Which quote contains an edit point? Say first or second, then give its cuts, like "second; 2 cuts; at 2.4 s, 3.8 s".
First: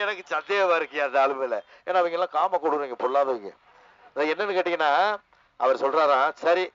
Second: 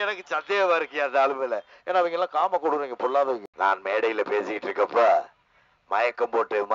second; 1 cut; at 3.5 s